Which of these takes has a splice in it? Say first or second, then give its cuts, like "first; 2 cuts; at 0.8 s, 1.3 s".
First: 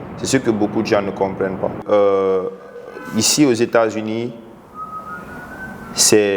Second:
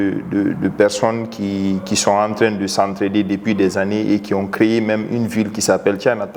first; 1 cut; at 1.8 s